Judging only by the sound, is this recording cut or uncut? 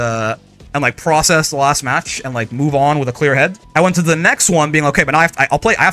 cut